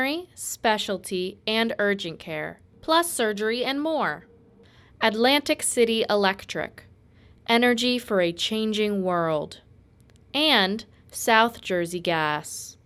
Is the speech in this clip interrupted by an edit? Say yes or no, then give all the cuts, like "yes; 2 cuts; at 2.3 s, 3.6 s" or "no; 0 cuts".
no; 0 cuts